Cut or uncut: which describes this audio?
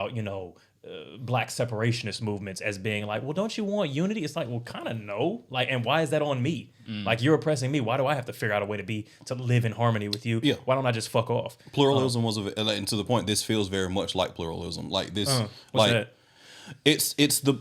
uncut